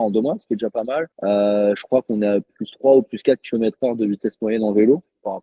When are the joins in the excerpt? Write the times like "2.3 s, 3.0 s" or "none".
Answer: none